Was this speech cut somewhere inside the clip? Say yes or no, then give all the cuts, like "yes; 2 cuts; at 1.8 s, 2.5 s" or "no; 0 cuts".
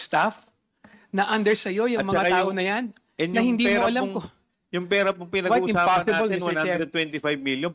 no; 0 cuts